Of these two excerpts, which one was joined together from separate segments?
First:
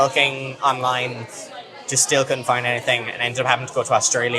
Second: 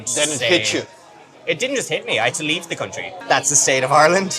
second; 1 cut; at 3.1 s

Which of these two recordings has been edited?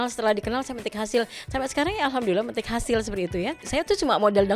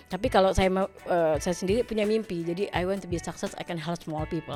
first; 1 cut; at 3.6 s

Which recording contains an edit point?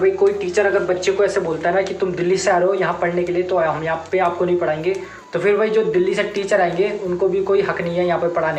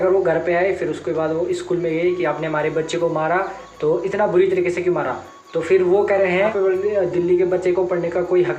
second; 1 cut; at 6.8 s

